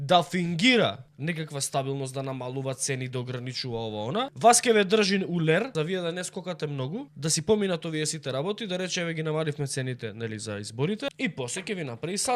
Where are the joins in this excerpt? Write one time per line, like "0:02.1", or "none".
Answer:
0:01.1
0:04.3
0:05.7
0:07.1
0:11.1